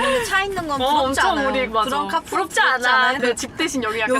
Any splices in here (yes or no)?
yes